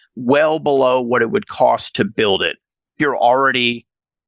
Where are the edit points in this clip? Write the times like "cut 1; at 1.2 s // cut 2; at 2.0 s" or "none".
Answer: cut 1; at 2.9 s